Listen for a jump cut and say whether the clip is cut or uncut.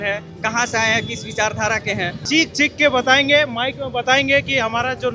cut